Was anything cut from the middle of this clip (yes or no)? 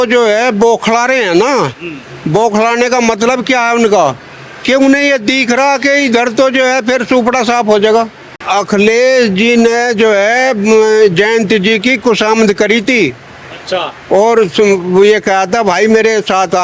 yes